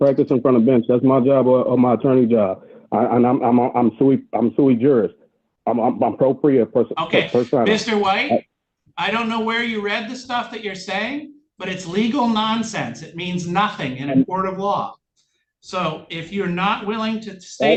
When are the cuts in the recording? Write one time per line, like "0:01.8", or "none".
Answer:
none